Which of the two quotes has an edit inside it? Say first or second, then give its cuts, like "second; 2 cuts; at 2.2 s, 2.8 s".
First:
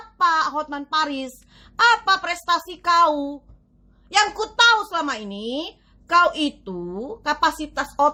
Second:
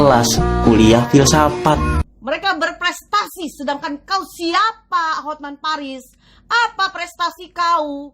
second; 1 cut; at 2.0 s